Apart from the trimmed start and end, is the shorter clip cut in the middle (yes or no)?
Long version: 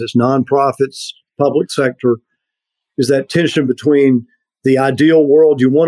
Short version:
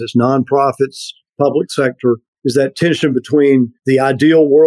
yes